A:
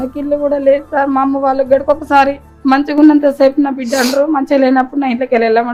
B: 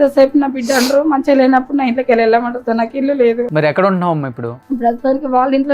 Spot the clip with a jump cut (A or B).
B